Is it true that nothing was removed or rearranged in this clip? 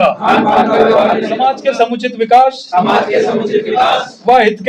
no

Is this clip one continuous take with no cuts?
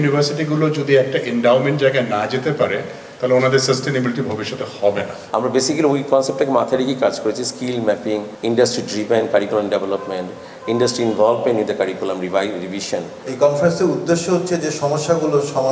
no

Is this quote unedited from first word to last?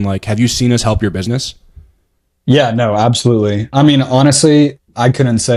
yes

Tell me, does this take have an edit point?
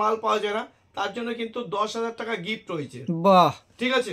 no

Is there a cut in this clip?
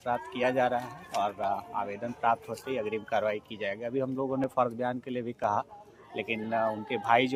no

